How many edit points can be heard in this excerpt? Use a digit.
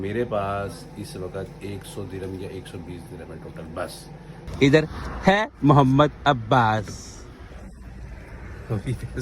1